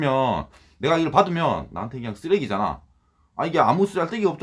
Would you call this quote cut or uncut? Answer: uncut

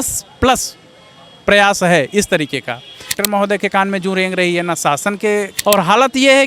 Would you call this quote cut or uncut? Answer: cut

